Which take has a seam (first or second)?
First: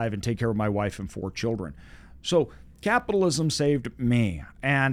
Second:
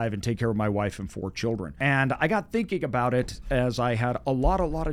second